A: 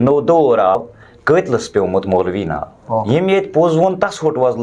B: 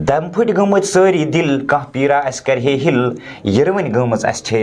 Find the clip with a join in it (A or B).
A